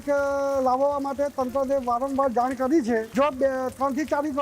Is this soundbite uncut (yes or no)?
no